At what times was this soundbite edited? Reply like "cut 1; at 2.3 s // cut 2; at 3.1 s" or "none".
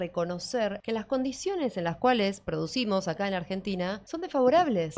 cut 1; at 0.8 s // cut 2; at 4.1 s

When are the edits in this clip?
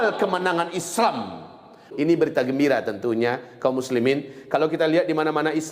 cut 1; at 1.9 s

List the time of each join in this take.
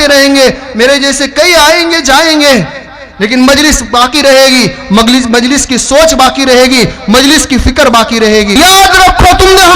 cut 1; at 8.6 s

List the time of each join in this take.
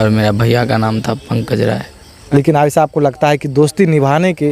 cut 1; at 2.2 s

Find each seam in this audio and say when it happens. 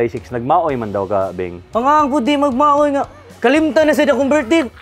cut 1; at 1.6 s

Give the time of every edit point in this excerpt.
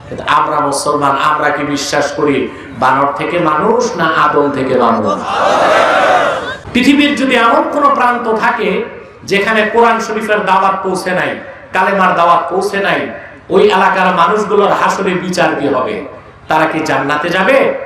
cut 1; at 6.5 s

